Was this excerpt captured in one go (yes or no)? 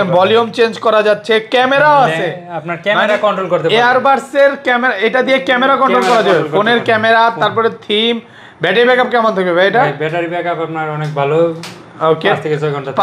yes